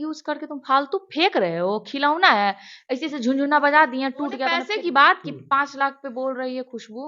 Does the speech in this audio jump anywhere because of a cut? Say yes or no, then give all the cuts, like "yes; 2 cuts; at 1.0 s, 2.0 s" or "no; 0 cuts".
yes; 1 cut; at 4.6 s